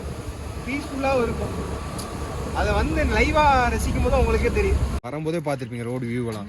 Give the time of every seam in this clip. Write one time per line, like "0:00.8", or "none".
0:04.9